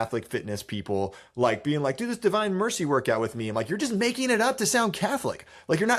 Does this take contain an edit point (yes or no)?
no